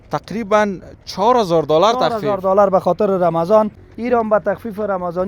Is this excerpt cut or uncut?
cut